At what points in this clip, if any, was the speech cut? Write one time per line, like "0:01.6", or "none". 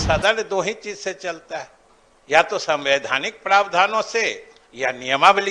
none

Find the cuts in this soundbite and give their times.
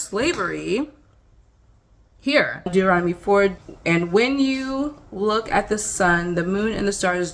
0:02.7
0:03.6

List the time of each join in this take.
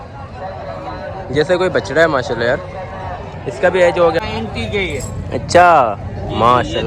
0:04.2

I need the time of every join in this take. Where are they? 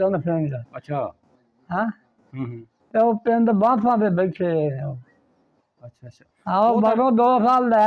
none

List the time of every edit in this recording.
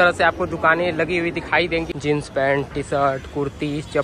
0:01.9

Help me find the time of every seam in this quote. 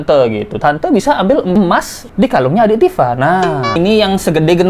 0:03.7

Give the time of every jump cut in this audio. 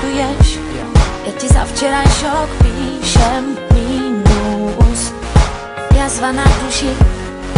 none

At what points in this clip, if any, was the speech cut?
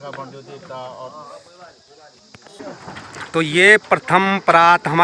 0:02.5

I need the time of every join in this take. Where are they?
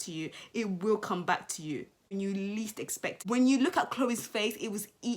0:02.0
0:03.2

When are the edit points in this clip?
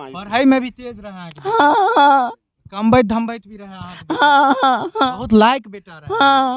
none

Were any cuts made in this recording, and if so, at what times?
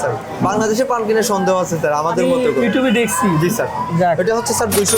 none

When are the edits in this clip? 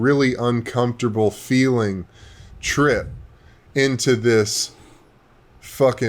none

